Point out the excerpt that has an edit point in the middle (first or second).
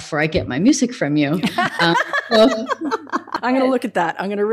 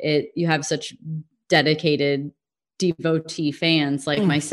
first